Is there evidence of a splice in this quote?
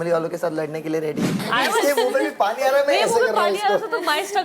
yes; 1 cut; at 1.4 s

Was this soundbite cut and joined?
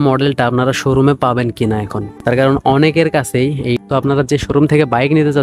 yes; 1 cut; at 3.8 s

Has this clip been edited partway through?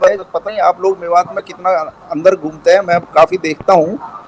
no; 0 cuts

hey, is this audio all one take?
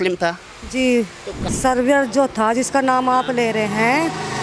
no; 1 cut; at 1.4 s

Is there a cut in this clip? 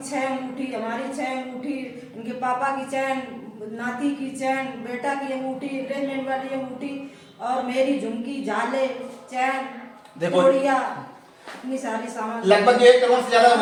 no; 0 cuts

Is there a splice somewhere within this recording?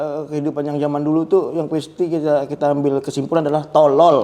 no; 0 cuts

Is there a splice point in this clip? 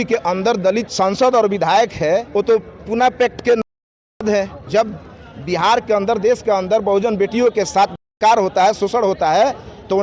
yes; 3 cuts; at 0.9 s, 2.3 s, 4.6 s

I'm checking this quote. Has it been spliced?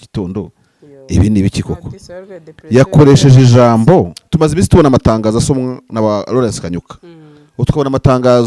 yes; 1 cut; at 4.2 s

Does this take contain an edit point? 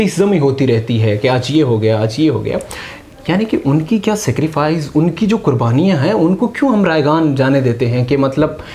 no; 0 cuts

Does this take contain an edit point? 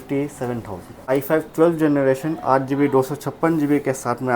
yes; 1 cut; at 1.0 s

